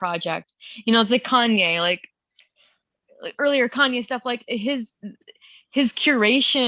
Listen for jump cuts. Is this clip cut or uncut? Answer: uncut